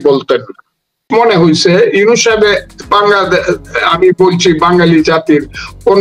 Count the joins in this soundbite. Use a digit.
1